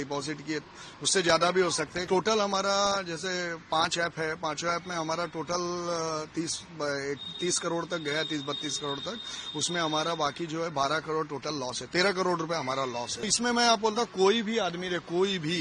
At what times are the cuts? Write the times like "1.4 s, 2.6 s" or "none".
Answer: 2.1 s, 13.3 s